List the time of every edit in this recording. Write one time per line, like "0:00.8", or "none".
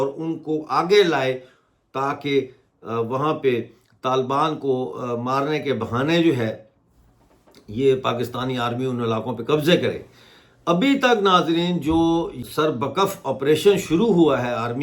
0:12.4

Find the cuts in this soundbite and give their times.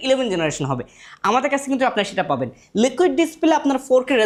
none

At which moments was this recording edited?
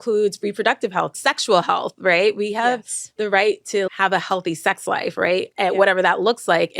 0:01.1
0:03.9

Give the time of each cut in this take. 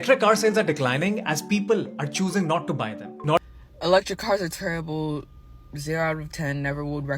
0:03.4

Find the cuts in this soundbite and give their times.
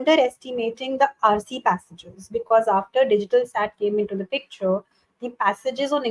none

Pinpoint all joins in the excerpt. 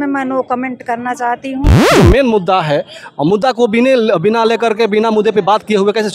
0:01.8

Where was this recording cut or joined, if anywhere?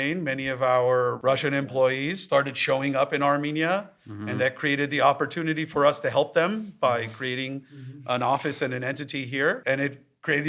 0:01.2
0:09.6

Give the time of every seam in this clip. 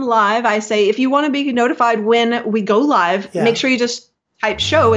none

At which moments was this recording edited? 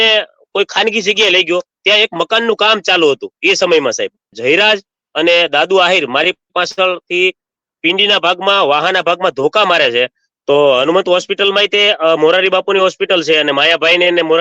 0:04.4
0:10.2

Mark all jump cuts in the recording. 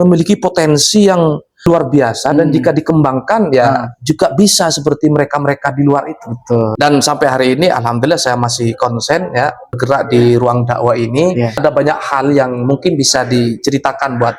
0:01.7
0:06.7
0:09.8
0:11.6

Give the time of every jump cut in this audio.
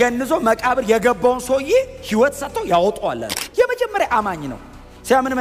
0:03.4

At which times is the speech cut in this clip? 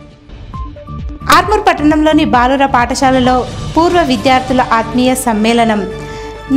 0:01.0

